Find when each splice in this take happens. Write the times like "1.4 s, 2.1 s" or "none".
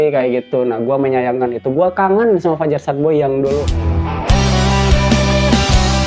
3.8 s

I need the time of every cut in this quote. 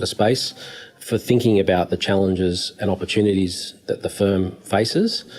1.0 s

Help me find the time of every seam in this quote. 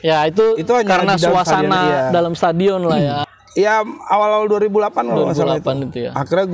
3.3 s

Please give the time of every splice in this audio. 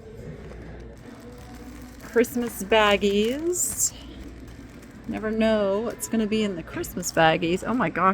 1.0 s

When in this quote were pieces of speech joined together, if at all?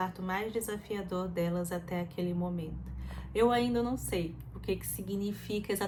none

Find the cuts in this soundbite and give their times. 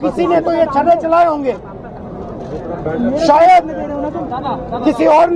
none

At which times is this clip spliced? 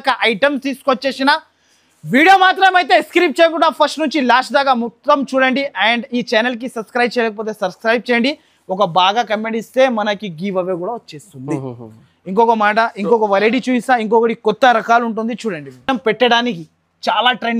none

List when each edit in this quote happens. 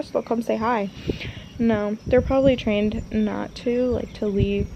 none

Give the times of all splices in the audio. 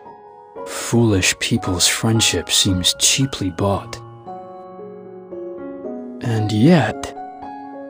none

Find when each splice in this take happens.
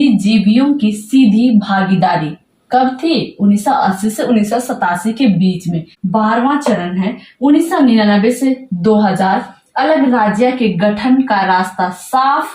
5.9 s

